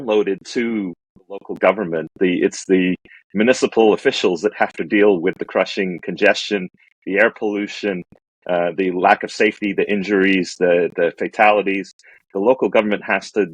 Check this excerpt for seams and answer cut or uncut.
uncut